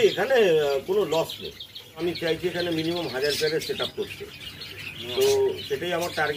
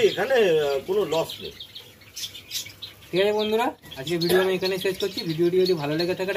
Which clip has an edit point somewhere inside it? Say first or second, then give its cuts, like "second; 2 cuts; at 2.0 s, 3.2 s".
first; 1 cut; at 2.0 s